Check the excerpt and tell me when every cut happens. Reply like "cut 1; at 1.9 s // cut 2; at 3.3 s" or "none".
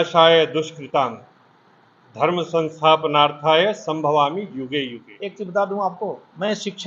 cut 1; at 5.1 s